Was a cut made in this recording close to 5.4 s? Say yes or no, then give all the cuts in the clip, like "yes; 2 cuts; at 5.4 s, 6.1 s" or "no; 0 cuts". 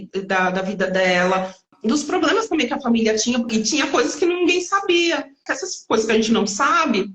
yes; 3 cuts; at 1.7 s, 3.5 s, 5.4 s